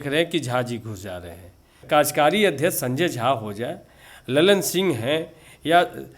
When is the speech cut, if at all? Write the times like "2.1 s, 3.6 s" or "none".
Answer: 1.8 s